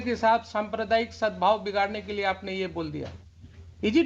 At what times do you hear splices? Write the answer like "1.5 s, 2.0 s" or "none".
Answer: none